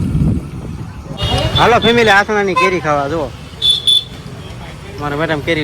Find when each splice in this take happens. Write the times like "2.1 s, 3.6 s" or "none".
1.0 s